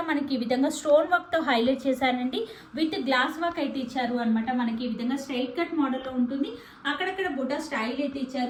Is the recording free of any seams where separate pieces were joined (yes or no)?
yes